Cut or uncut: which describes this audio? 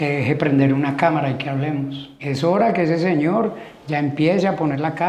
cut